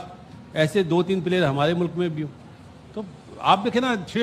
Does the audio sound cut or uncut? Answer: uncut